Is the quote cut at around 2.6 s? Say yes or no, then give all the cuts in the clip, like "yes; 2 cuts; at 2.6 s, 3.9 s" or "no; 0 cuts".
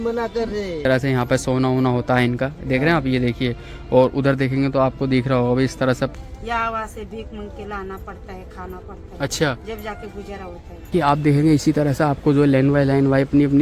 no; 3 cuts; at 0.8 s, 6.1 s, 10.9 s